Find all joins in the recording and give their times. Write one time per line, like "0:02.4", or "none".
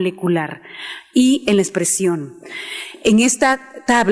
none